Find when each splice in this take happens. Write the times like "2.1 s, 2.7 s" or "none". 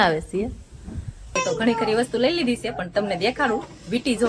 1.4 s